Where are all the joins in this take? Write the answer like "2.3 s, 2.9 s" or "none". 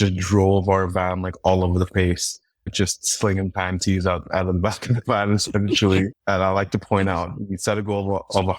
6.2 s